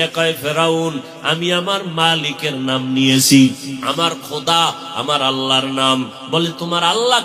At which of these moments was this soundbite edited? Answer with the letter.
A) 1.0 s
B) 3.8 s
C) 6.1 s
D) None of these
B